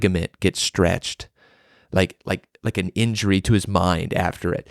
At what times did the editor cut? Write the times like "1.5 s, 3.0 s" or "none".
none